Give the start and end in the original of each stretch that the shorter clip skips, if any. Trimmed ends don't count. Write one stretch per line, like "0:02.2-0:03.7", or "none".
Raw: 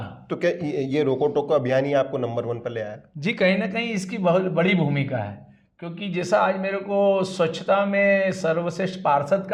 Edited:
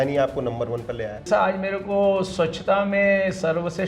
0:03.0-0:06.2